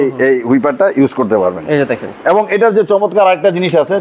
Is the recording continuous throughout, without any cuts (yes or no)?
yes